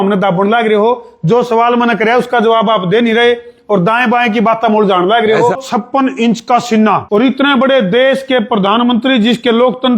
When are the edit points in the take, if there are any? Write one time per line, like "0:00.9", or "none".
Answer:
0:05.6
0:07.0